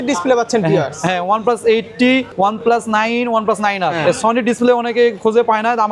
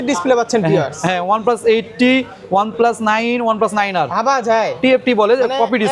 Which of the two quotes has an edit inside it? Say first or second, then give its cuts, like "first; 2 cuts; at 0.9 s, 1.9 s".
first; 2 cuts; at 2.3 s, 3.9 s